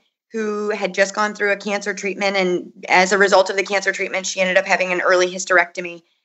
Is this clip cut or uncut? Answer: uncut